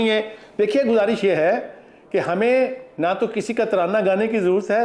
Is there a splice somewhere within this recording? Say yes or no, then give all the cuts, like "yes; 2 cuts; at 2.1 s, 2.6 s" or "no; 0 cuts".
no; 0 cuts